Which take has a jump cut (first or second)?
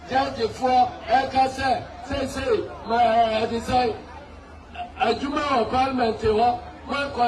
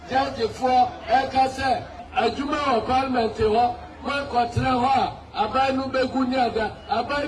second